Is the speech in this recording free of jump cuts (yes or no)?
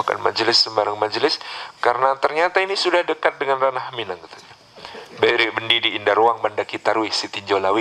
yes